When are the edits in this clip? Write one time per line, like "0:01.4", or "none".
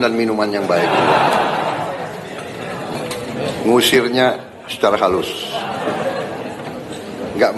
0:03.3